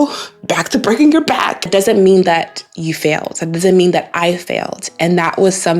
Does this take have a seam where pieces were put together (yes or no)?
yes